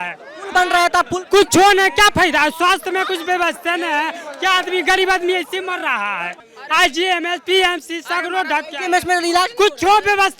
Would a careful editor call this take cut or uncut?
cut